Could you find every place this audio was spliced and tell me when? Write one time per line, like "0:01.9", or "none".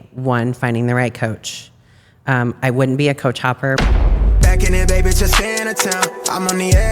0:04.1